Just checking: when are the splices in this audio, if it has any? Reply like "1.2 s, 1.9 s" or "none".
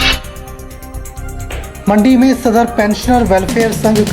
1.4 s